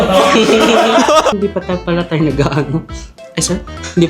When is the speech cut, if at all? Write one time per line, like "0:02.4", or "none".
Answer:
0:01.3